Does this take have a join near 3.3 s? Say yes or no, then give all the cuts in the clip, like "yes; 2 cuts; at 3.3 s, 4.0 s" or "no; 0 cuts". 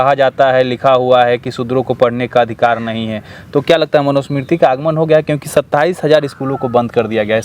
no; 0 cuts